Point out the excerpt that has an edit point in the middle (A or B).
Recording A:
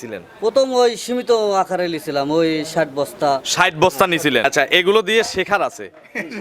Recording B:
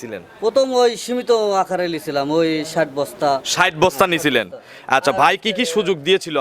A